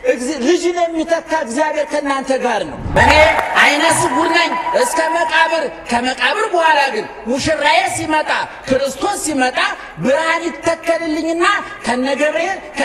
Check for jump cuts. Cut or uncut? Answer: cut